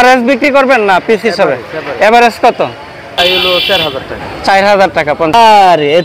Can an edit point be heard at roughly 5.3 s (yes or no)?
yes